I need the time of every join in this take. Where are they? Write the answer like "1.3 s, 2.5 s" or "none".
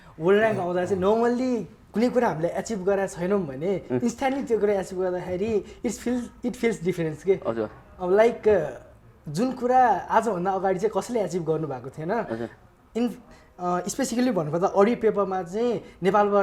none